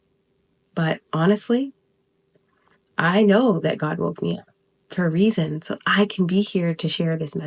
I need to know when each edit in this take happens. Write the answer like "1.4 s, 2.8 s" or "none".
none